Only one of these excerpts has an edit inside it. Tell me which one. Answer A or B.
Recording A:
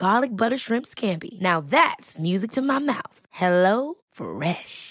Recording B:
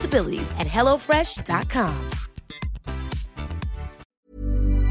B